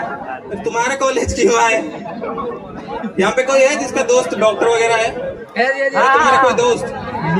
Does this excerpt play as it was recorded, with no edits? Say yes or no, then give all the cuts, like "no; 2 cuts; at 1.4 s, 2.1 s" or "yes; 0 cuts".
yes; 0 cuts